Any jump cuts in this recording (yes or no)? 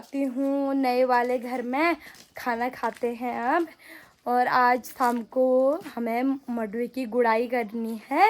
no